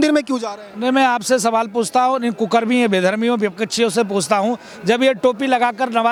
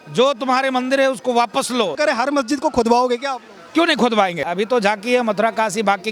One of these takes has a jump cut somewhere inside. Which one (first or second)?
second